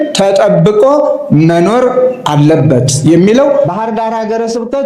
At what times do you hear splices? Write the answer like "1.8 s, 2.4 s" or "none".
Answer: 3.7 s